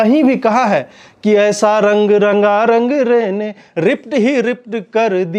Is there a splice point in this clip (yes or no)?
no